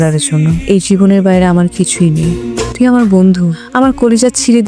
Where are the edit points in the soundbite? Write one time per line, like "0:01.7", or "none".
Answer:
none